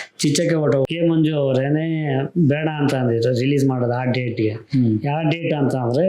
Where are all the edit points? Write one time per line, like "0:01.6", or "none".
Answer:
0:00.9